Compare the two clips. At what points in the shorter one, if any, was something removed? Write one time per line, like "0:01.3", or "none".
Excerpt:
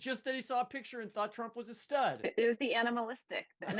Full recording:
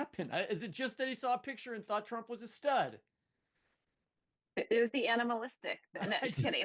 0:02.2